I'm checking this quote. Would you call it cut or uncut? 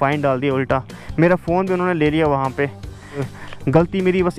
cut